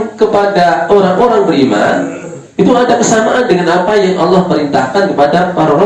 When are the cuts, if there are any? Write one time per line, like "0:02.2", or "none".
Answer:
none